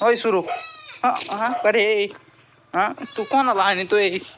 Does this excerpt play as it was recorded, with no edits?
yes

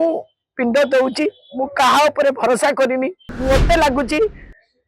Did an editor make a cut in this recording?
yes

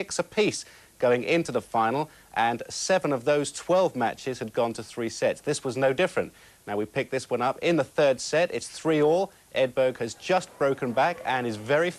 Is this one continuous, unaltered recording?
yes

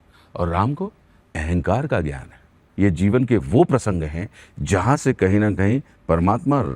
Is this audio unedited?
no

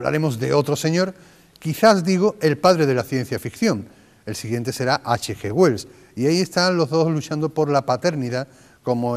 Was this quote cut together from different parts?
yes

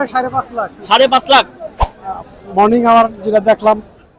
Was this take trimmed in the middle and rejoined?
yes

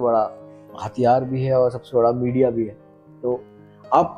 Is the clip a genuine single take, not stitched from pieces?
yes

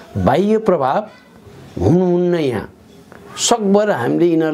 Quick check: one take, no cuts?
yes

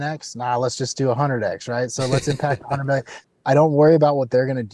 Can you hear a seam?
yes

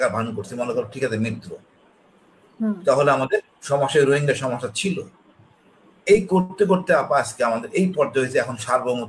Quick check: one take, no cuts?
yes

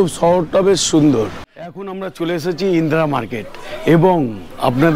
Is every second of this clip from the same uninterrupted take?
no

